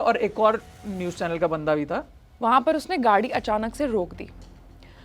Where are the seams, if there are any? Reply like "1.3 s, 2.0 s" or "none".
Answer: 2.2 s